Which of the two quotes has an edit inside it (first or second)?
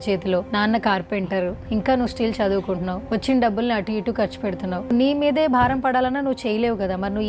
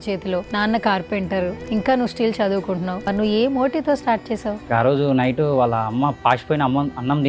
second